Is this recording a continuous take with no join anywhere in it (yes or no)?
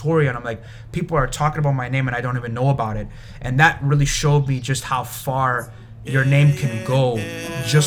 yes